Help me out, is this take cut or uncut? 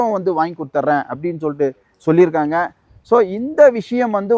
uncut